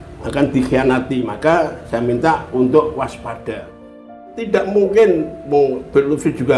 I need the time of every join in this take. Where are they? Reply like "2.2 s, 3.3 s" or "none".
4.2 s

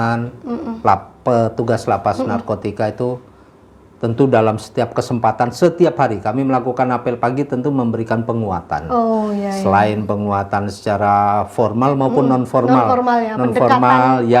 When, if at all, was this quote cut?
none

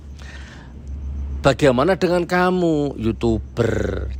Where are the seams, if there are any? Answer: none

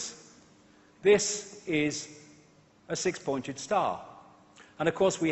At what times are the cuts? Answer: 2.4 s

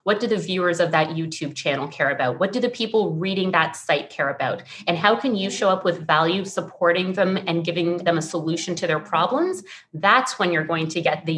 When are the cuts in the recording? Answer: none

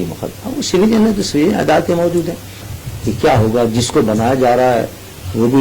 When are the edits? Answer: 2.7 s

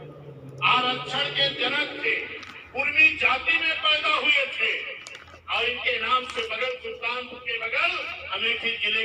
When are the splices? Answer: none

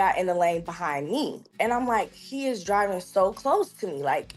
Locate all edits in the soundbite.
1.4 s

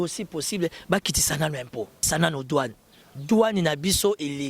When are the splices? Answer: 2.0 s

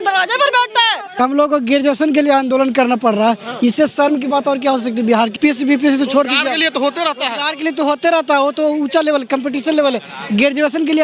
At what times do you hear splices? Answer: 1.2 s, 5.4 s

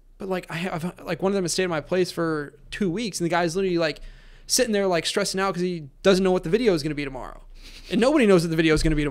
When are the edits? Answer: none

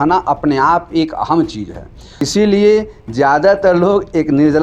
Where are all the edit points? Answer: 2.3 s

